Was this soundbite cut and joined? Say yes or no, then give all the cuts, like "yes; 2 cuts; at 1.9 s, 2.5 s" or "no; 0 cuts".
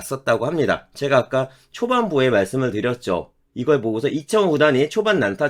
no; 0 cuts